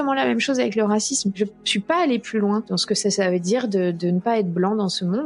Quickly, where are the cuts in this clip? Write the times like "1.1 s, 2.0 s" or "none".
1.4 s, 2.7 s